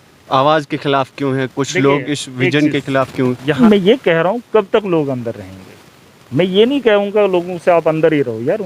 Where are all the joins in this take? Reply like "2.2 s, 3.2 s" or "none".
3.6 s